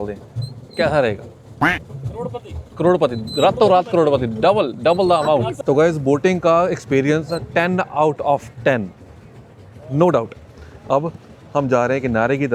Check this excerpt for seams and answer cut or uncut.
uncut